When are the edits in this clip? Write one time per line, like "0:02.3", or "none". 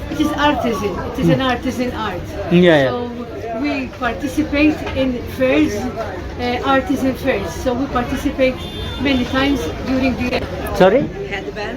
0:10.3